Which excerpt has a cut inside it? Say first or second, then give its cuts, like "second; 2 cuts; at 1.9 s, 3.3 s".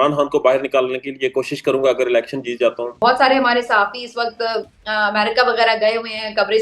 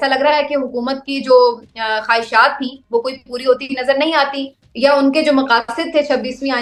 first; 1 cut; at 2.9 s